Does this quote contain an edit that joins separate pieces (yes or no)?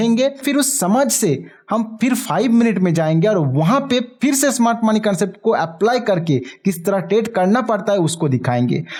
no